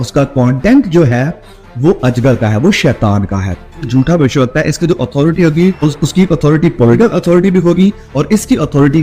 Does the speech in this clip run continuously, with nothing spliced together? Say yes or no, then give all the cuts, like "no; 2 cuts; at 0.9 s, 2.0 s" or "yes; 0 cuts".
no; 3 cuts; at 3.9 s, 5.8 s, 7.0 s